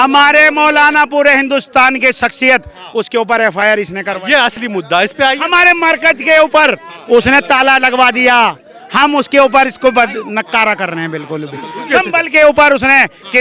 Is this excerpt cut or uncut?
uncut